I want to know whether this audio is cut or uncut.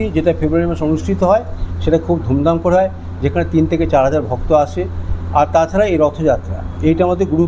uncut